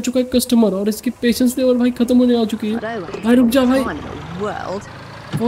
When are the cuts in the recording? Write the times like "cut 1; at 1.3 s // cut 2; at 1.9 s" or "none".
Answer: none

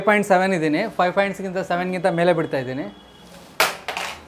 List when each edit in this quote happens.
none

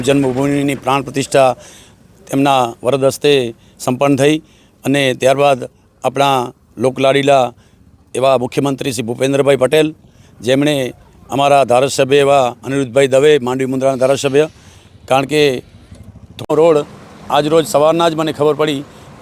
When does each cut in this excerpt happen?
cut 1; at 16.4 s

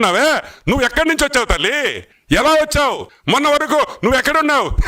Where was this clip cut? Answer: cut 1; at 2.1 s // cut 2; at 3.1 s

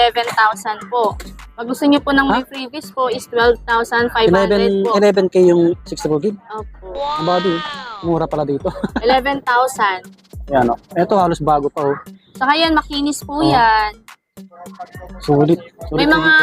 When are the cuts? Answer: cut 1; at 10.0 s

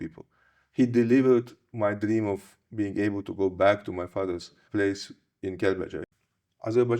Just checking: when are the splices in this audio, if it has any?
cut 1; at 4.5 s // cut 2; at 6.0 s

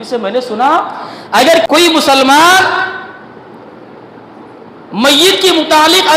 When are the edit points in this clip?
cut 1; at 1.7 s

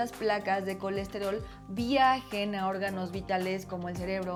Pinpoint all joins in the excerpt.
none

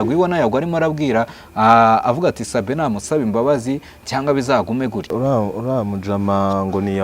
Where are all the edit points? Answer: cut 1; at 5.1 s

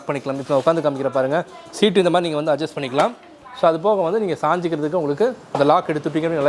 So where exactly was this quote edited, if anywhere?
none

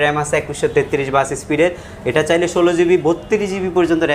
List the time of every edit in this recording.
none

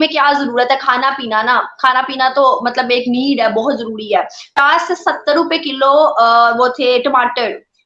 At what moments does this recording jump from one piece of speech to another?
cut 1; at 4.5 s

